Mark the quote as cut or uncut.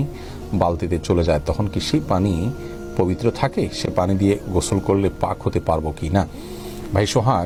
uncut